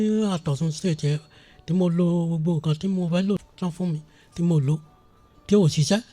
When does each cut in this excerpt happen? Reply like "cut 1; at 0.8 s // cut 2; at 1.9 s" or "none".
cut 1; at 3.4 s